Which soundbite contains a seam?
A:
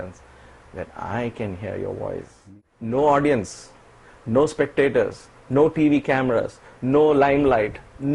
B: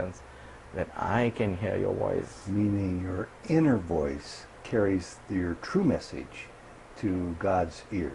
A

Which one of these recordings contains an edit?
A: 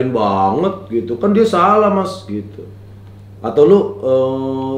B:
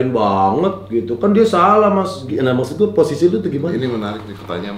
B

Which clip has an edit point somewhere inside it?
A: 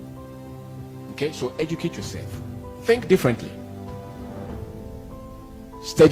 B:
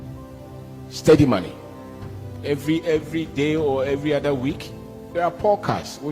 B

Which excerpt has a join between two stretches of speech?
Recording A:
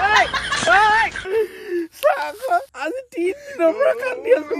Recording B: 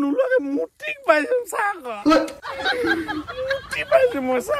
A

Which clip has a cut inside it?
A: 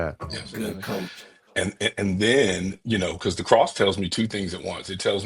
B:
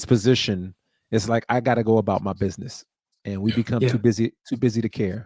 A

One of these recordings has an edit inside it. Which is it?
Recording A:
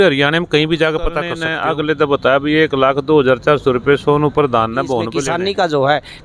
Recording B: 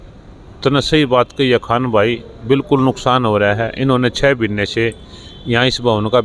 A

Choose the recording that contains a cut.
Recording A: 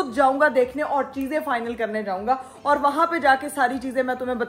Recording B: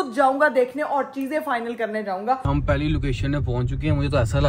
B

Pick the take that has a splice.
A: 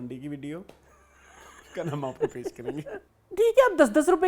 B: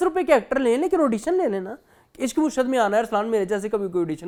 A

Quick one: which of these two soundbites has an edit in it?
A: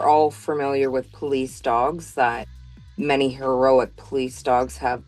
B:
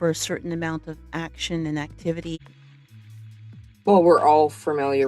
B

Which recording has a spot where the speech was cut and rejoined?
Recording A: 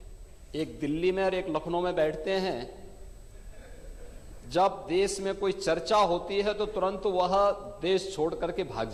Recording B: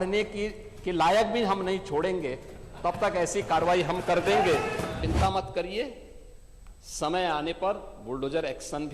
B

